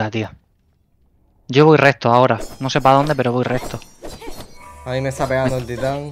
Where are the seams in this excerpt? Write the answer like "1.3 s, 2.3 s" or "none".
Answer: none